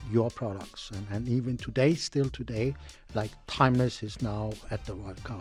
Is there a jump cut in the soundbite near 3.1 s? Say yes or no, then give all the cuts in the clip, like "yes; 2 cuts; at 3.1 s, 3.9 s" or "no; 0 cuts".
no; 0 cuts